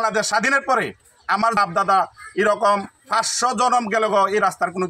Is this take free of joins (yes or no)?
no